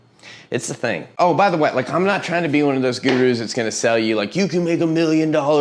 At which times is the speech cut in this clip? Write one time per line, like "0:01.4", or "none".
0:01.1